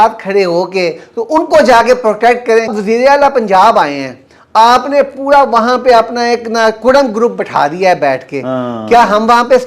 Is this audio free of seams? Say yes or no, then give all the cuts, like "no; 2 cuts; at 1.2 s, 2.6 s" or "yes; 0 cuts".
no; 1 cut; at 2.7 s